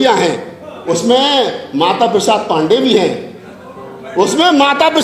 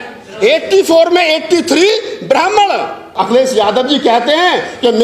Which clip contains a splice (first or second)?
second